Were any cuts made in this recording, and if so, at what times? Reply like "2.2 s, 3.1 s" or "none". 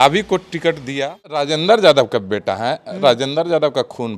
1.5 s